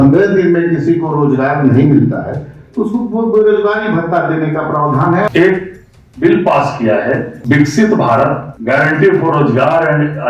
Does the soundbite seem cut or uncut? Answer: cut